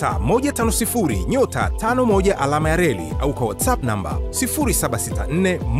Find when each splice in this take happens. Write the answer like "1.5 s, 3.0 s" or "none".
none